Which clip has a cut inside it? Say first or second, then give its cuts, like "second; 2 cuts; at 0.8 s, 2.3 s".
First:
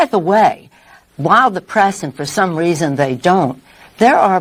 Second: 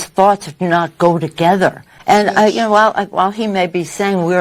second; 1 cut; at 1.9 s